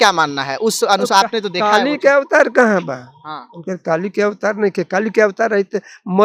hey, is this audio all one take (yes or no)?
yes